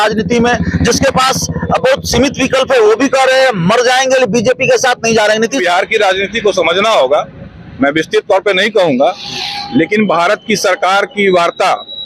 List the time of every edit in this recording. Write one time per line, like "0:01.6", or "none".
0:05.6